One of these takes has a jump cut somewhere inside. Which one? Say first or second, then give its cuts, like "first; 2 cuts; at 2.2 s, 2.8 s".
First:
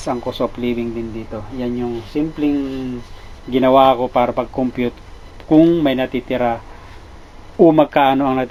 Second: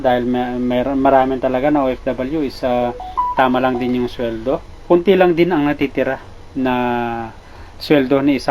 second; 1 cut; at 4.7 s